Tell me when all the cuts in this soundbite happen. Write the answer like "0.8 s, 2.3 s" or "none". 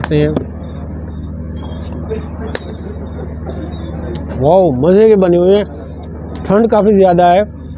none